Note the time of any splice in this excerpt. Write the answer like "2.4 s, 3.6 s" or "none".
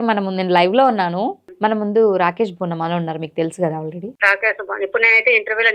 1.4 s, 4.1 s